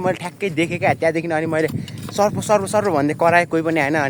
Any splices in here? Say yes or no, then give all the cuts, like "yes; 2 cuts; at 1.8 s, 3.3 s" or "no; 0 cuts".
no; 0 cuts